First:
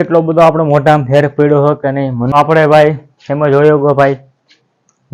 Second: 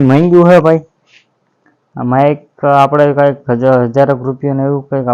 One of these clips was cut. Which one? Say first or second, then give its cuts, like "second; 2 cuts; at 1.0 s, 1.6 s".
first; 1 cut; at 2.2 s